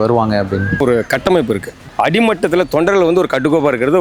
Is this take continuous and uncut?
no; 2 cuts; at 0.8 s, 1.8 s

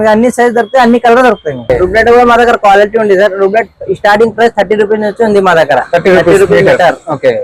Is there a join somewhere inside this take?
yes; 1 cut; at 1.7 s

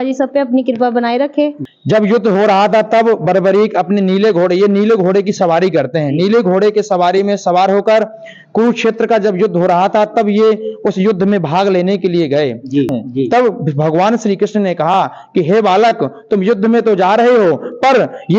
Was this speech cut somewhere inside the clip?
yes; 2 cuts; at 1.7 s, 12.9 s

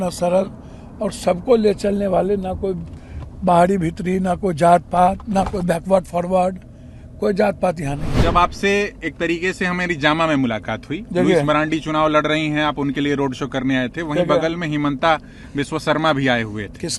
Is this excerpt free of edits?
no; 1 cut; at 8.1 s

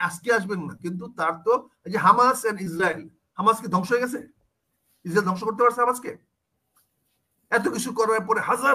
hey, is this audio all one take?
yes; 0 cuts

